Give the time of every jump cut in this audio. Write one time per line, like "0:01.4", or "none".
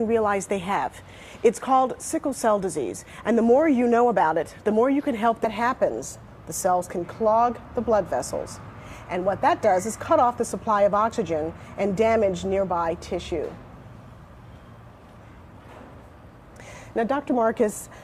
none